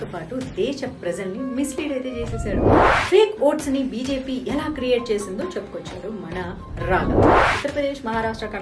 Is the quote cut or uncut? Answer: cut